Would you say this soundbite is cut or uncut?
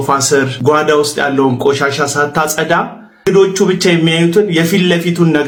uncut